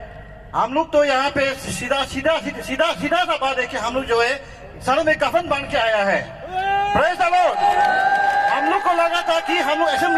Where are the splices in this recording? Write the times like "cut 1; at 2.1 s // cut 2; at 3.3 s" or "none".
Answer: none